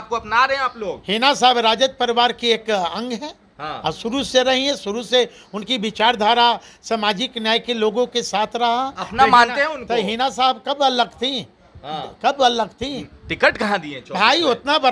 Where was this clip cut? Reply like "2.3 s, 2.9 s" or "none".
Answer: none